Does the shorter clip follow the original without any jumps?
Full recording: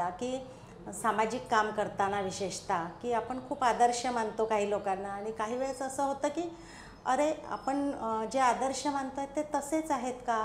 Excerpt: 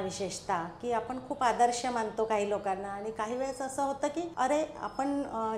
no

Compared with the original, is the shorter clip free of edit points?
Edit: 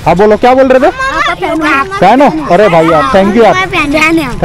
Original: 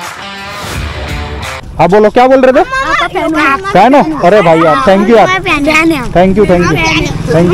yes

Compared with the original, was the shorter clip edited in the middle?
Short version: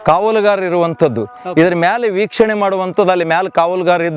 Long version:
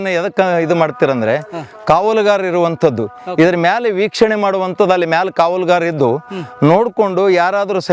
no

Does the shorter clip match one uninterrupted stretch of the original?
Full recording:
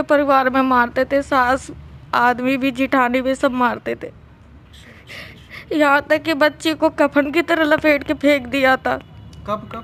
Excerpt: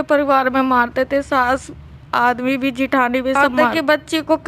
no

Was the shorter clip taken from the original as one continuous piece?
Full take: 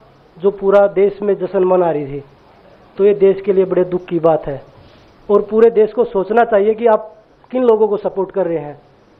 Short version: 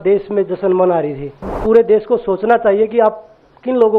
no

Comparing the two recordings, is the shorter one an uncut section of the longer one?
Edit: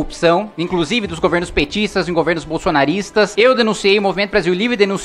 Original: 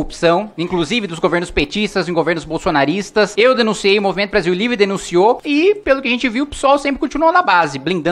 yes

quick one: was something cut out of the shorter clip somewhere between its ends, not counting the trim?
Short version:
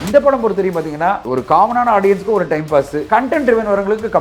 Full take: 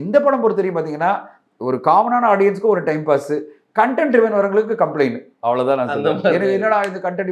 yes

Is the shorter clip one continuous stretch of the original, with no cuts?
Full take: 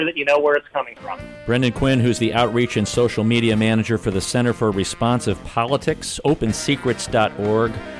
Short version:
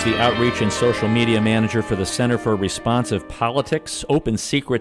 yes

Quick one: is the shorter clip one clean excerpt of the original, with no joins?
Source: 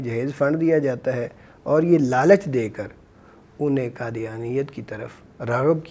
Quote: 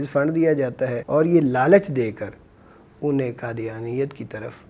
no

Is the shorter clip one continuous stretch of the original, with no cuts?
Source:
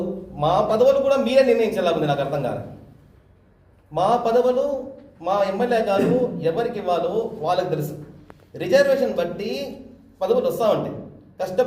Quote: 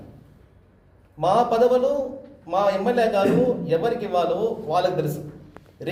yes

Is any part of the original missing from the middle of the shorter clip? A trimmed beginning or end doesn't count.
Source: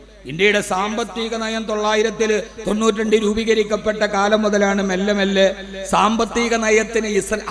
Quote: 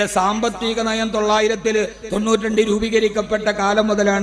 no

